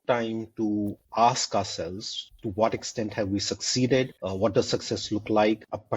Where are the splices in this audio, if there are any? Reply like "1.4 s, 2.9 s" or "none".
1.0 s